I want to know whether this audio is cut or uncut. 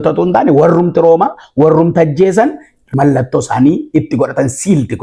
cut